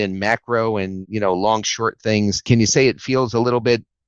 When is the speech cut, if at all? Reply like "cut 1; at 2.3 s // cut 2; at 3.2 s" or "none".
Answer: cut 1; at 1.0 s // cut 2; at 2.4 s